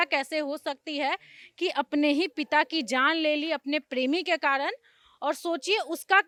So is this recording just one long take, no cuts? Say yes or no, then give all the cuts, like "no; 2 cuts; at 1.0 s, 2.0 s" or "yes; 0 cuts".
yes; 0 cuts